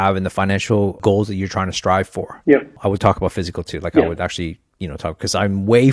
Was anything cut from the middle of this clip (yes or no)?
yes